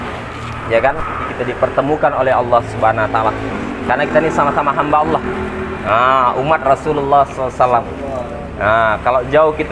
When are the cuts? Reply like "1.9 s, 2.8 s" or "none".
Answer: 1.2 s